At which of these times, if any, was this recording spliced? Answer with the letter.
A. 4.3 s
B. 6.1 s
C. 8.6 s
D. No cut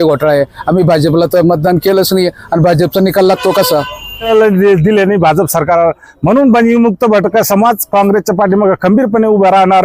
A